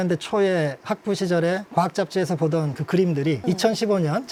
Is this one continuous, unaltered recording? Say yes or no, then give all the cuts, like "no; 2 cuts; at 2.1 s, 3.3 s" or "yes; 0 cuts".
yes; 0 cuts